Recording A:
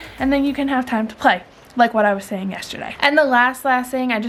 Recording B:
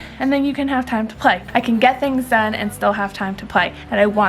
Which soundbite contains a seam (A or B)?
B